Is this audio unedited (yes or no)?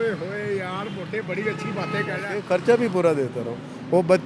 no